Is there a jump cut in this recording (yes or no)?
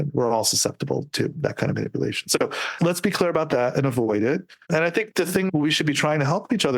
yes